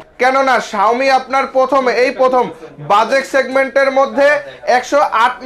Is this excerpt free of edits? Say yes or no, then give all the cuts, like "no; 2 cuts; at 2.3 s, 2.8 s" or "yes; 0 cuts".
yes; 0 cuts